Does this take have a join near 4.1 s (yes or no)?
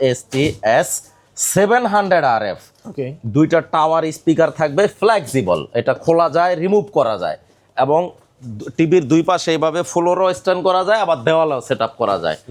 no